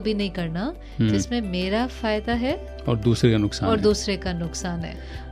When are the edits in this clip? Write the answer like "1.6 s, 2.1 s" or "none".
2.7 s